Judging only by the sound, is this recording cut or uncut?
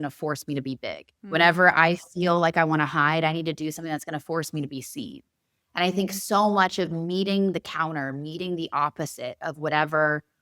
cut